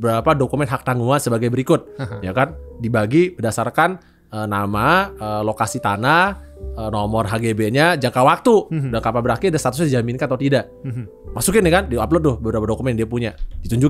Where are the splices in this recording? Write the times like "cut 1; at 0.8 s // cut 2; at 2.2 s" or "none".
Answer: none